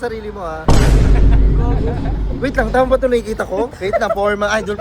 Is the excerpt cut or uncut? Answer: cut